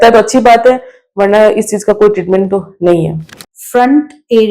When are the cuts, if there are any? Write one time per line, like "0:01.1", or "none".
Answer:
0:03.4